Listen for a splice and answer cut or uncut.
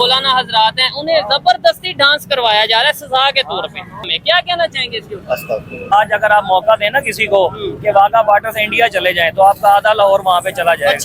cut